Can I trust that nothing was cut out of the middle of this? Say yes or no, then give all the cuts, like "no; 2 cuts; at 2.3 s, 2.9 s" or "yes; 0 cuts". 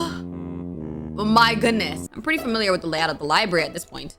no; 1 cut; at 2.1 s